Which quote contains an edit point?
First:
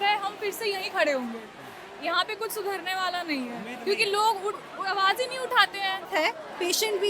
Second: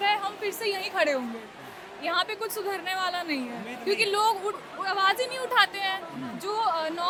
first; 1 cut; at 6.1 s

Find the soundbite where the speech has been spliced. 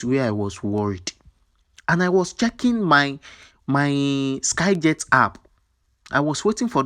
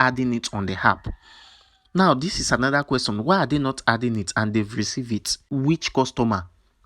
second; 1 cut; at 5.4 s

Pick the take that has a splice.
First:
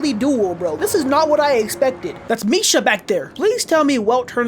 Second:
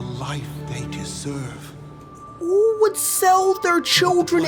first; 2 cuts; at 2.1 s, 3.3 s

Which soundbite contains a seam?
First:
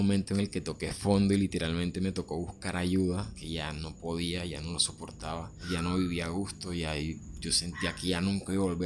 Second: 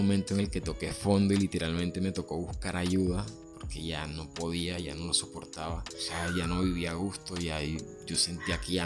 first; 2 cuts; at 3.4 s, 5.6 s

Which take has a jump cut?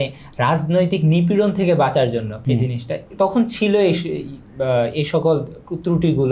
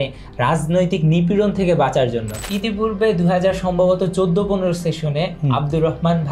second; 1 cut; at 2.4 s

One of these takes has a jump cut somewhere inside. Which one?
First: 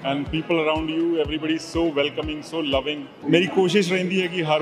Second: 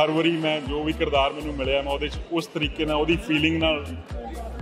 first; 1 cut; at 3.1 s

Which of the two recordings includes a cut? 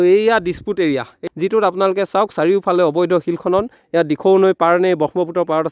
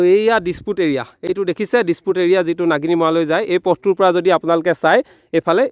first; 1 cut; at 1.2 s

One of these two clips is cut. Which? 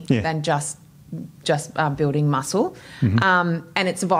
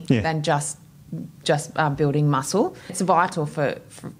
second; 1 cut; at 2.9 s

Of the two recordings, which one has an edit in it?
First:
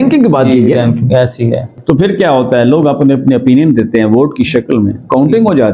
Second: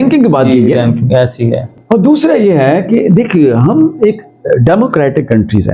first; 1 cut; at 1.7 s

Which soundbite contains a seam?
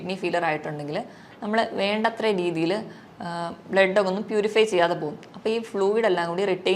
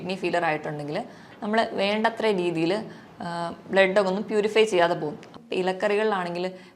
second; 1 cut; at 5.3 s

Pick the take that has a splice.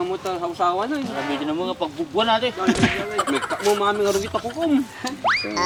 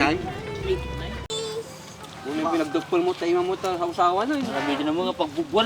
second; 1 cut; at 1.3 s

